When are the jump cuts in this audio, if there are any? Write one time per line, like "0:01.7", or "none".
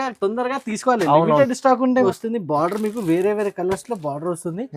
0:02.0